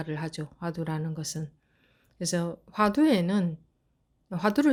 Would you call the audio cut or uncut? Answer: uncut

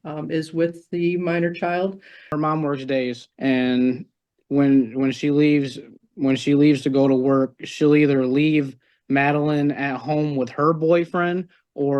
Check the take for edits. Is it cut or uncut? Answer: cut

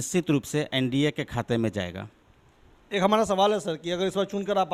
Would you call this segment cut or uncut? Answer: uncut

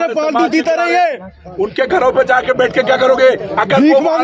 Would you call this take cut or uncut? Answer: uncut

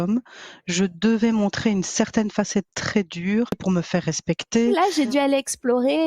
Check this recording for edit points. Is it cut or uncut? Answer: cut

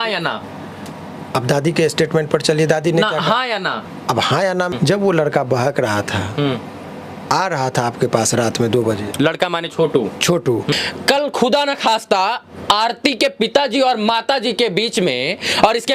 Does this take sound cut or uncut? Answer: cut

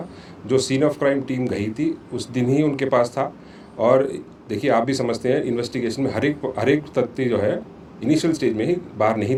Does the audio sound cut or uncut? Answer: uncut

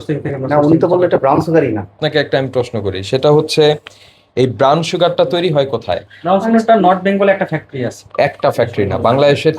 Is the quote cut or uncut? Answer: cut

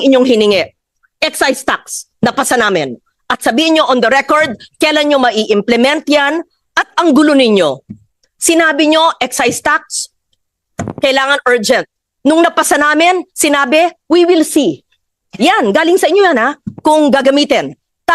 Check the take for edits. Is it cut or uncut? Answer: uncut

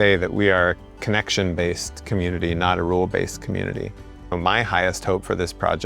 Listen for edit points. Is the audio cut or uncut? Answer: cut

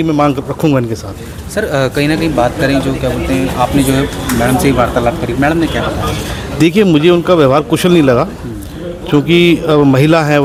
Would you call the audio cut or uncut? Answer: uncut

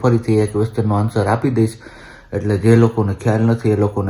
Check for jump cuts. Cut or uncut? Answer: uncut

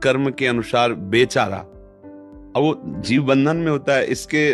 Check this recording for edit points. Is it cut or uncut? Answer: uncut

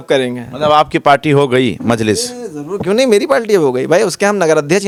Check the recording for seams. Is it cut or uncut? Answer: uncut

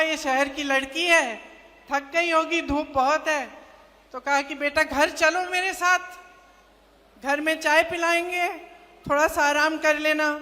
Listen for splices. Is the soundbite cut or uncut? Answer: uncut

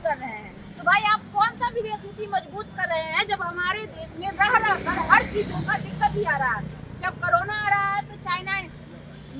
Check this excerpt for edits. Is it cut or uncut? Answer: uncut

